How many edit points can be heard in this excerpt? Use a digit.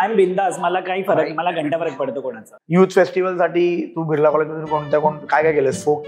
1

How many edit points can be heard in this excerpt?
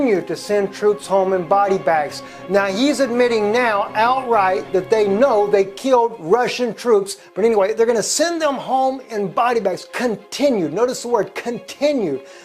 0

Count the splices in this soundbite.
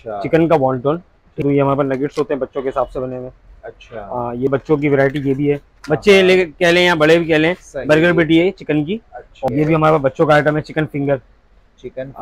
3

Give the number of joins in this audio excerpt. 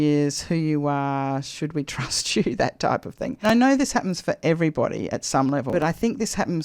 2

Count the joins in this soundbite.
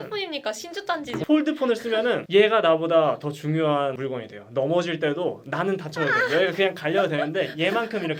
2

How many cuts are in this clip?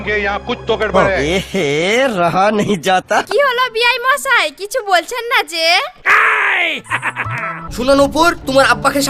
1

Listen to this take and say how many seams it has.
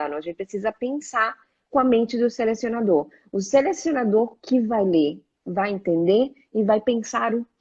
0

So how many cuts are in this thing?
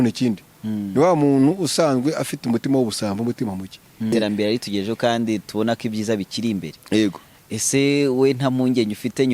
1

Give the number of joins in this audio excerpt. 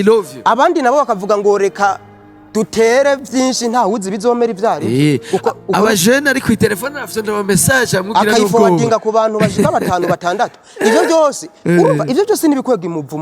0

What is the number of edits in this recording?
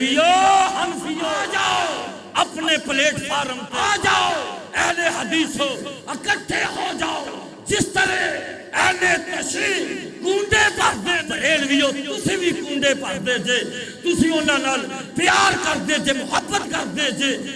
3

